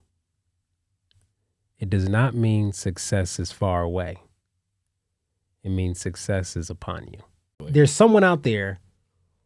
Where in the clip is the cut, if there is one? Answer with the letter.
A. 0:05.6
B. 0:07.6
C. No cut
B